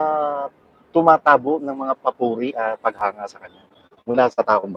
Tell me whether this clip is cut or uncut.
uncut